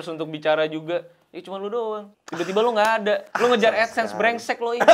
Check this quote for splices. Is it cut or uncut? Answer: cut